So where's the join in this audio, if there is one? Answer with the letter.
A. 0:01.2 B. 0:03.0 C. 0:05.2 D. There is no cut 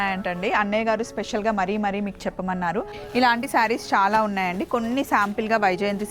B